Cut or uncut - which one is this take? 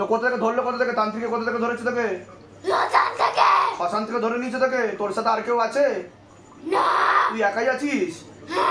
uncut